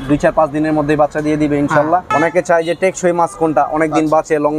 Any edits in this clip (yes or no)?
yes